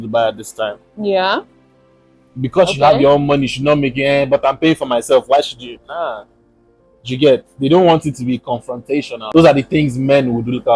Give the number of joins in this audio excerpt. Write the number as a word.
one